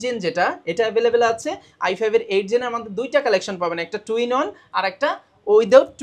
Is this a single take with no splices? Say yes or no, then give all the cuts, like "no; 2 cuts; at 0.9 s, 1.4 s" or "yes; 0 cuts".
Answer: yes; 0 cuts